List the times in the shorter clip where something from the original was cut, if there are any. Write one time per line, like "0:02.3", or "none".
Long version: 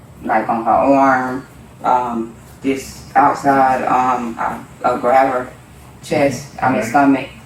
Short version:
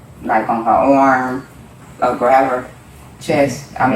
0:01.7